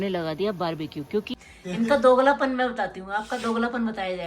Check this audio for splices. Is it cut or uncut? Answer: cut